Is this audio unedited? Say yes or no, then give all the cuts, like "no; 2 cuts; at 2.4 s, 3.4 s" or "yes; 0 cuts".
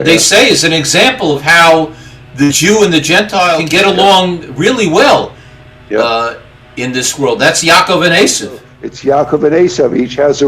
no; 2 cuts; at 3.6 s, 8.7 s